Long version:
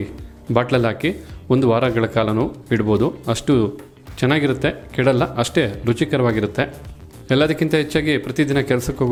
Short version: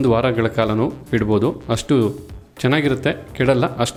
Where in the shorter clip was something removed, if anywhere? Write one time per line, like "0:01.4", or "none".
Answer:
none